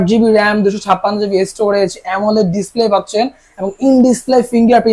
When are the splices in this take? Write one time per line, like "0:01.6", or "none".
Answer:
none